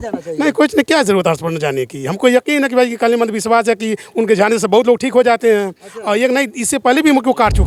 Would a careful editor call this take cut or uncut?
uncut